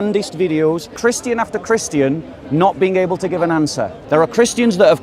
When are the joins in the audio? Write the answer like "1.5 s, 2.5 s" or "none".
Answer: 0.9 s, 4.0 s